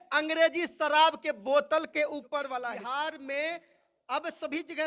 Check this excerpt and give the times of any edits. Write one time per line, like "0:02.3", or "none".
0:02.5